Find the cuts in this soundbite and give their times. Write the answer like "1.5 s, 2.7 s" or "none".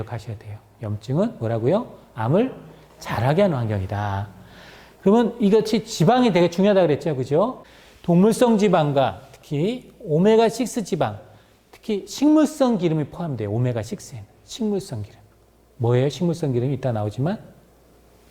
7.6 s